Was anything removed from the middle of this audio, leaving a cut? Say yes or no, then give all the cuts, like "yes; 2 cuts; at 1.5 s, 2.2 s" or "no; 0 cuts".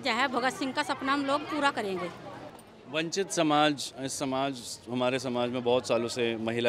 no; 0 cuts